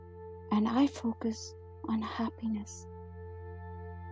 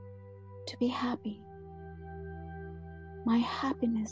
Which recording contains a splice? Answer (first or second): second